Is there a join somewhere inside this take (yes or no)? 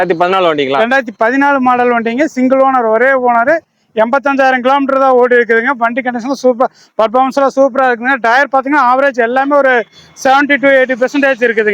no